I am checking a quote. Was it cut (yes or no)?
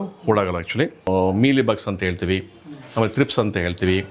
yes